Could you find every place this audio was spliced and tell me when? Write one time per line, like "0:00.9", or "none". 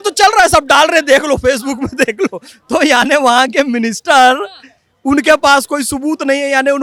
none